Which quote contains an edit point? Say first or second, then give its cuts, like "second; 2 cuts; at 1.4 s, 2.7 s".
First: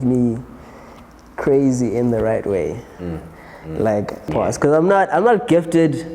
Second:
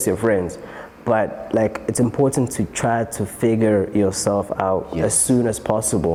first; 1 cut; at 4.3 s